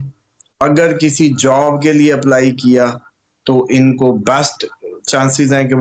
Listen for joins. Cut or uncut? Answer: uncut